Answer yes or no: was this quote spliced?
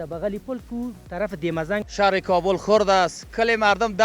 yes